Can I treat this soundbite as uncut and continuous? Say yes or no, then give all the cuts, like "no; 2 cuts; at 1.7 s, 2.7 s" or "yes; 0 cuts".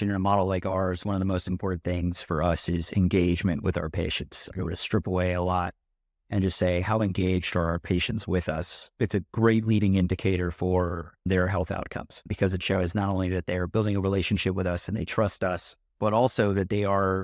no; 1 cut; at 4.5 s